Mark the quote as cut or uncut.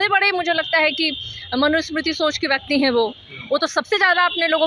uncut